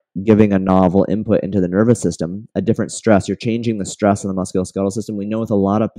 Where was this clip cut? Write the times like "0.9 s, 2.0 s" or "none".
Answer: none